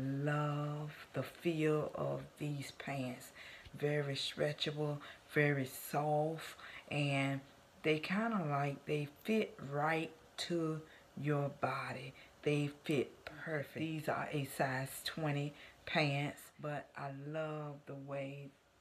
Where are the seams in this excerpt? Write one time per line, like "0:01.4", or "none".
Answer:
0:13.7
0:16.5